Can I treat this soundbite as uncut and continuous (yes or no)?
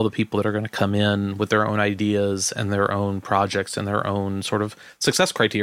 yes